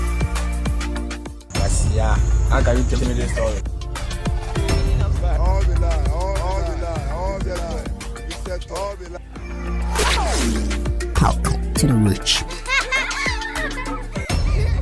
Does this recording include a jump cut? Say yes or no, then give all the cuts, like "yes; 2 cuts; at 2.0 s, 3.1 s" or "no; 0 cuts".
no; 0 cuts